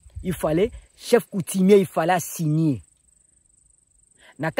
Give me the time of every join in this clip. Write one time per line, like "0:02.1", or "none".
none